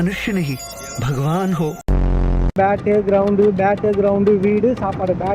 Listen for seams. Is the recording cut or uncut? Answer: cut